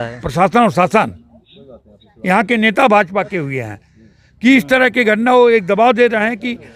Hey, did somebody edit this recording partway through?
no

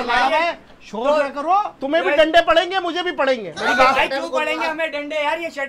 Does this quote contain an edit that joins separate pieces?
yes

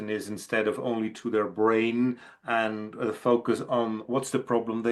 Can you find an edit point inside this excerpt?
no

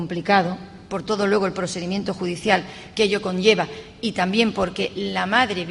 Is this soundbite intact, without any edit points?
no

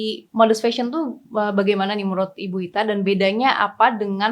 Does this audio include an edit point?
no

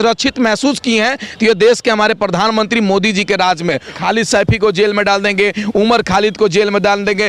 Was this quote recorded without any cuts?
no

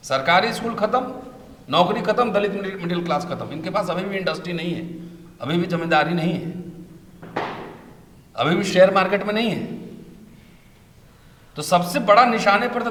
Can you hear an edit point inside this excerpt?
no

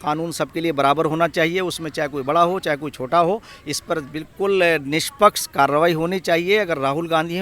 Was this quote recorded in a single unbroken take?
yes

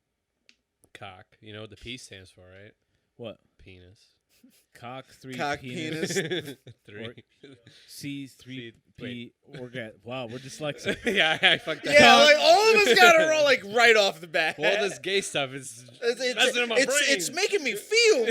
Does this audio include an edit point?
no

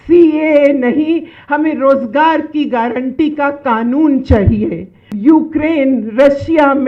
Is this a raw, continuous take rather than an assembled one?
no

